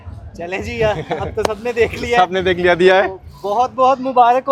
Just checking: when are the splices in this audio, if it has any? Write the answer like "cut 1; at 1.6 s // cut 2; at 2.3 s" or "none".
none